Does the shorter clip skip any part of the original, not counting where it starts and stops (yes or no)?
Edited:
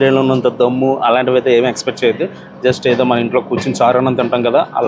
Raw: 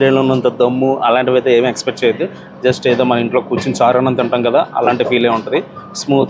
no